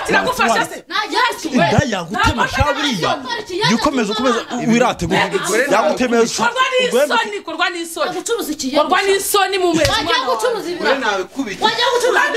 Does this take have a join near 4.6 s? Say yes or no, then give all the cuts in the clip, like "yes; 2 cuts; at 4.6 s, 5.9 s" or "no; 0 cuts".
no; 0 cuts